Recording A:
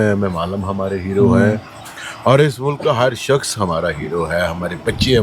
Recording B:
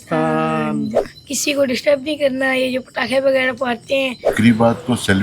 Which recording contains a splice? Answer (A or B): B